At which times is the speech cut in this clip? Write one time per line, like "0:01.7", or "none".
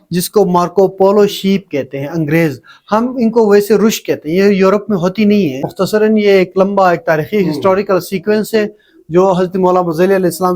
0:05.7